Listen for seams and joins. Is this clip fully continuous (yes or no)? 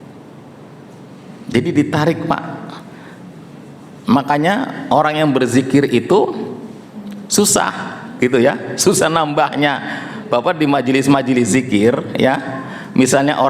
yes